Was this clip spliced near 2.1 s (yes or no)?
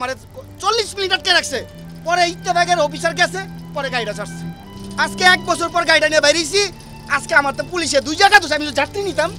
no